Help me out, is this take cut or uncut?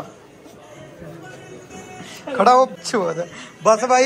cut